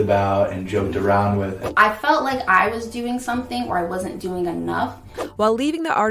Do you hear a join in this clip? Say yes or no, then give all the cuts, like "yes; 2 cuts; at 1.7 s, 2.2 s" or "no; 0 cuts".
yes; 2 cuts; at 1.6 s, 5.2 s